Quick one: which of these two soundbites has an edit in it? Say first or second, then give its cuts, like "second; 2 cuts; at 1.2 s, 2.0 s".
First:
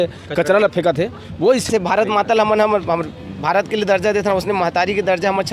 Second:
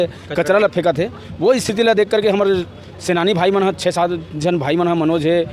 first; 1 cut; at 1.7 s